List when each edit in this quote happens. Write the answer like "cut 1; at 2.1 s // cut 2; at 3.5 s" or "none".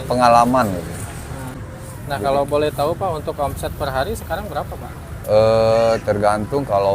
cut 1; at 1.5 s